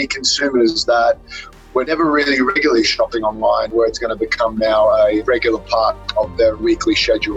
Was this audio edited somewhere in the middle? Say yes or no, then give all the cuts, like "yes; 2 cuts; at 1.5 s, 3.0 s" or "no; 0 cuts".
yes; 4 cuts; at 1.9 s, 3.7 s, 5.2 s, 6.6 s